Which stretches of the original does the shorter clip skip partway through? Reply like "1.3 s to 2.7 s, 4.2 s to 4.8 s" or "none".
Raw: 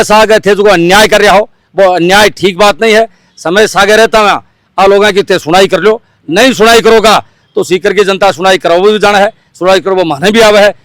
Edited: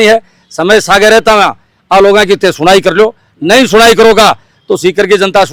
none